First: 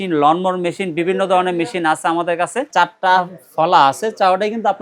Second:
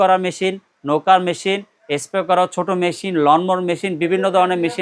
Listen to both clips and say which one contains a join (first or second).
first